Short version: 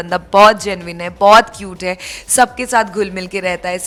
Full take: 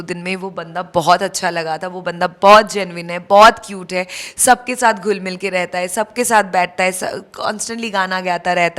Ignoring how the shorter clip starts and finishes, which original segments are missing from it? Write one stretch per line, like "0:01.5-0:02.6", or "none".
none